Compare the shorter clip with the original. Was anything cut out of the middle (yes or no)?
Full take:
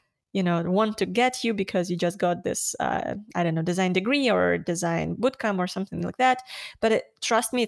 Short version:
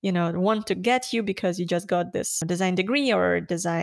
yes